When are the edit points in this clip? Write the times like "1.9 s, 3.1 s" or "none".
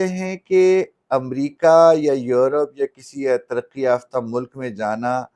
none